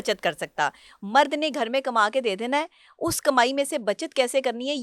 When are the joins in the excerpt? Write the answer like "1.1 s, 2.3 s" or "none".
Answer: none